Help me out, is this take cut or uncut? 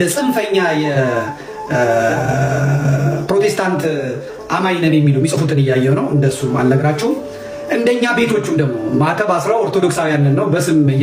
uncut